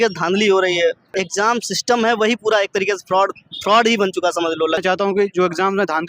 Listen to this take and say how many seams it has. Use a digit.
2